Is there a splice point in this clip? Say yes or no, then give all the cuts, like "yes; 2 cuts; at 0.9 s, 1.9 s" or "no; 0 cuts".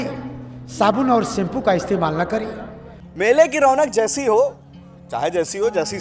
yes; 1 cut; at 3.1 s